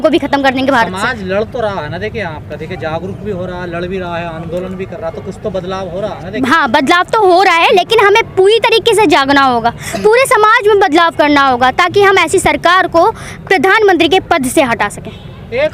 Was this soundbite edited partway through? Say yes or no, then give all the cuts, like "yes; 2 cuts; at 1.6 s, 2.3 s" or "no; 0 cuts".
no; 0 cuts